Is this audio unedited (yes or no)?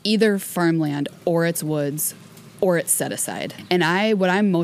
no